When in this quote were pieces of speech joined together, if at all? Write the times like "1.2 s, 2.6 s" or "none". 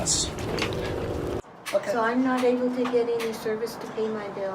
1.4 s